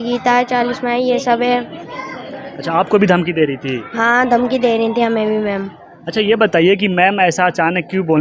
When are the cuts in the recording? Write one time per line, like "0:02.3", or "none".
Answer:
none